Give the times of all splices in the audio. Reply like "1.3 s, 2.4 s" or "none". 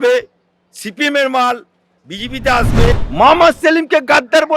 3.0 s